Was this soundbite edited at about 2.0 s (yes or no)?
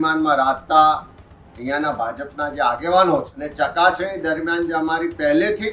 no